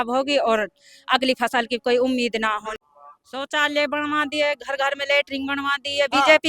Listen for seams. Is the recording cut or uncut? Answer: cut